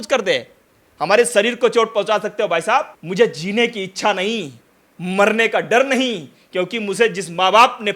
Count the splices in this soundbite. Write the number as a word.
one